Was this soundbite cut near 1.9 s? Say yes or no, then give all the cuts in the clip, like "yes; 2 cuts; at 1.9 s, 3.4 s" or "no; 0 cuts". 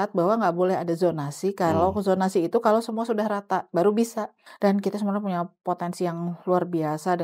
no; 1 cut; at 4.4 s